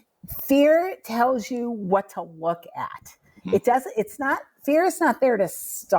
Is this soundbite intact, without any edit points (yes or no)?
yes